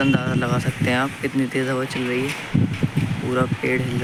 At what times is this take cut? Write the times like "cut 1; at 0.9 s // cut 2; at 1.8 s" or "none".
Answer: none